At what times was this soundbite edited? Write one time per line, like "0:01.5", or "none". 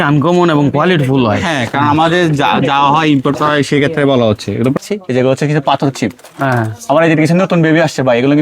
0:04.8